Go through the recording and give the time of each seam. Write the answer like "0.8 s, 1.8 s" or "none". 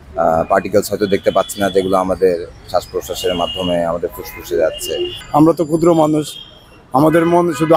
5.2 s